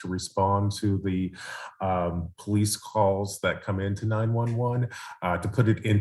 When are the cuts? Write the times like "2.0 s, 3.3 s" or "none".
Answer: none

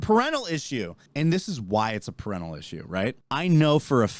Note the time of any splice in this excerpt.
1.0 s, 3.2 s

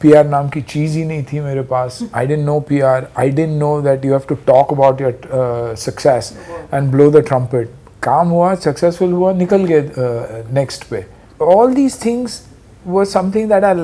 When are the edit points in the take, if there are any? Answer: none

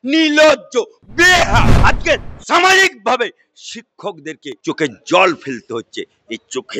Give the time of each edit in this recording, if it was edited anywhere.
1.7 s, 4.5 s

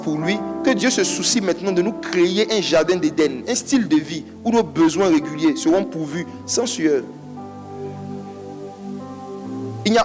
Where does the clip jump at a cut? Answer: none

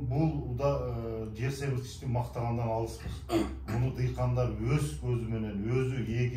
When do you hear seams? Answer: none

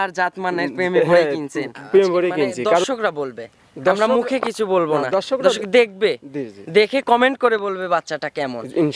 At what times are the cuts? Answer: 2.8 s

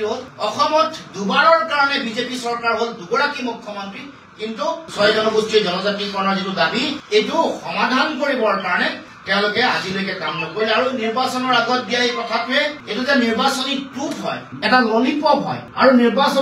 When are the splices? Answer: none

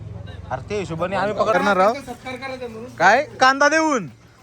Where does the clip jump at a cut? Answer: 1.5 s

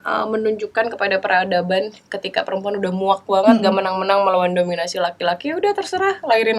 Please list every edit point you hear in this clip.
none

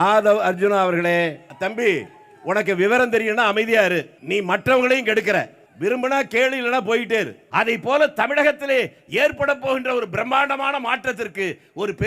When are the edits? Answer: 1.5 s, 4.2 s, 5.6 s, 7.4 s

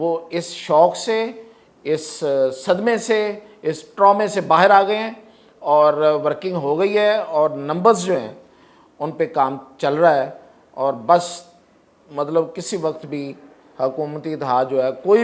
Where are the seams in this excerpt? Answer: none

